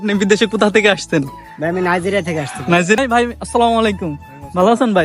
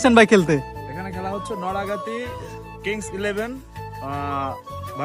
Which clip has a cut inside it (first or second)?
first